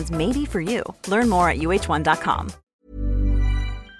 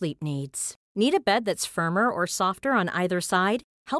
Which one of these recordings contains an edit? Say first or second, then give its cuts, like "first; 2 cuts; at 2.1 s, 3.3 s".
first; 1 cut; at 2.7 s